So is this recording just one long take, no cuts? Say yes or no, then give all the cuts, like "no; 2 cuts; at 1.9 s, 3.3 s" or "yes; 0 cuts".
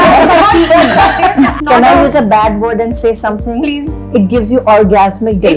no; 1 cut; at 1.6 s